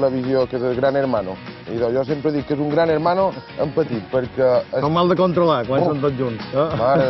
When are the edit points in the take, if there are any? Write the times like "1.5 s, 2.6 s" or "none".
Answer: none